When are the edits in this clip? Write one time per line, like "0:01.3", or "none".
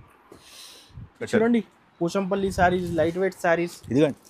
0:01.3